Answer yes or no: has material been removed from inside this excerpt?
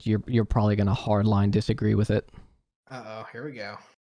no